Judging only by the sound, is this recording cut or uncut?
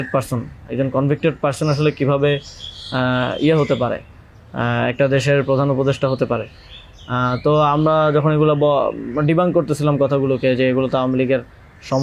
uncut